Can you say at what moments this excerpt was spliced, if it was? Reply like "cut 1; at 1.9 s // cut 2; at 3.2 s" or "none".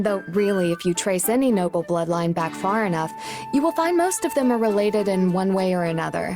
none